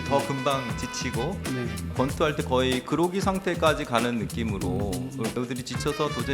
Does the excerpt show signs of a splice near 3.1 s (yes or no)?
no